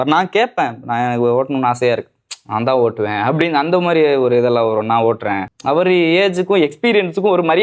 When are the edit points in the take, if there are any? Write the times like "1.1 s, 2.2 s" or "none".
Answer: 5.5 s